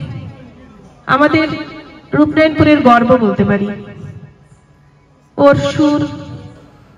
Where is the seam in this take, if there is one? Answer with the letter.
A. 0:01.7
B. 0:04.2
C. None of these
C